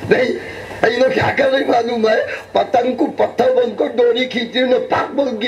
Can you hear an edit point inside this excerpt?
no; 0 cuts

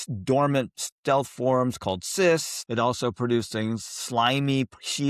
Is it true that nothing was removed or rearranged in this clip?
no; 1 cut; at 2.6 s

